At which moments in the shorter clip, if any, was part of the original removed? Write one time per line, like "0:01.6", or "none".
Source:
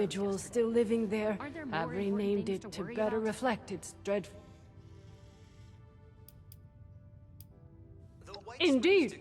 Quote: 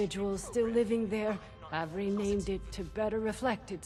none